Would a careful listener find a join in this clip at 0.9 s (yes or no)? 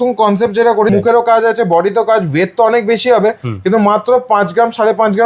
yes